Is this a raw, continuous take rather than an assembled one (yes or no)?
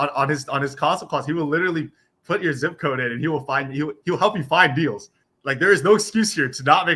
yes